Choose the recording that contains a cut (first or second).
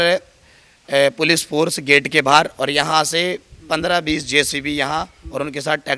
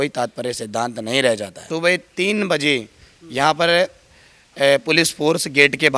second